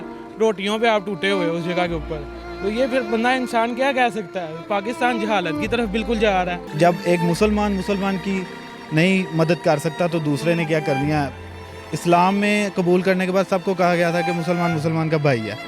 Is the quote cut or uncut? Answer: cut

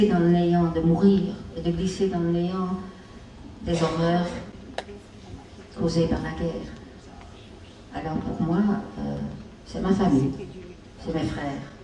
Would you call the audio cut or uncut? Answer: uncut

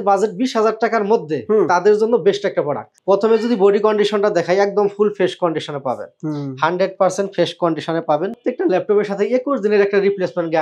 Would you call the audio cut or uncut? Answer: cut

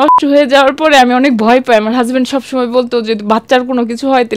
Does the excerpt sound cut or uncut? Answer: uncut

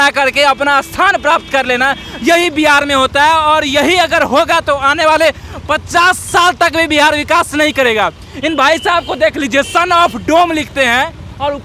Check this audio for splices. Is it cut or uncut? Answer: uncut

